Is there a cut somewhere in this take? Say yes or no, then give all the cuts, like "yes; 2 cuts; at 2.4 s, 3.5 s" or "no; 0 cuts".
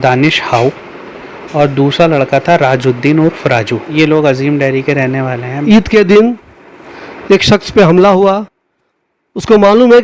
yes; 2 cuts; at 3.9 s, 5.6 s